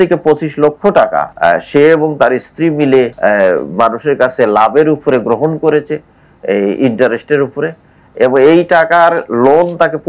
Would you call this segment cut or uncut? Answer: cut